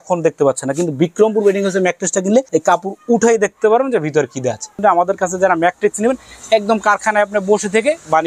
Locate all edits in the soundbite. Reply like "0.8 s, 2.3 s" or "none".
2.5 s, 4.8 s